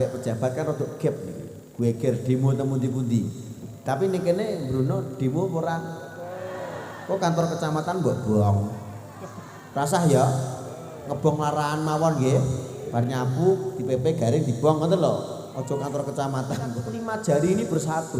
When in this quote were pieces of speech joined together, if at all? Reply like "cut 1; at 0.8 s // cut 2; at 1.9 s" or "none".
cut 1; at 16.9 s